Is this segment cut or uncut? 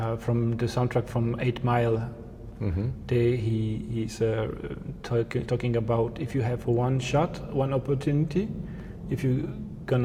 uncut